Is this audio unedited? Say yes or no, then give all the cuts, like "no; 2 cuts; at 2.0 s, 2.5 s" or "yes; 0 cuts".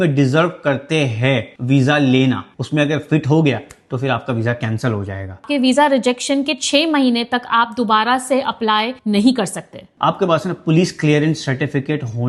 no; 3 cuts; at 2.5 s, 5.5 s, 9.9 s